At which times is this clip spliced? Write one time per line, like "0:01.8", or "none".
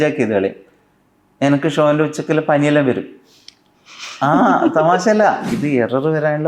0:05.6